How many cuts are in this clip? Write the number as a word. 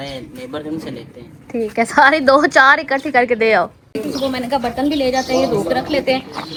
zero